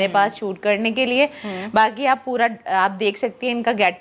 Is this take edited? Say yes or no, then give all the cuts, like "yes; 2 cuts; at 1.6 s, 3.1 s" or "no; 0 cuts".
no; 0 cuts